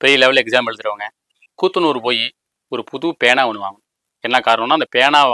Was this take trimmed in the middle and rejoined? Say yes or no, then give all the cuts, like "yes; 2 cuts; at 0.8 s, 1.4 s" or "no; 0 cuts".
yes; 2 cuts; at 1.1 s, 4.1 s